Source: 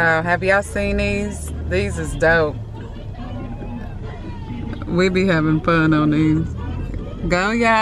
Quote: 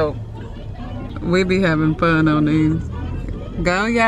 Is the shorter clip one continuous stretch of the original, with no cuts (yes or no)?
no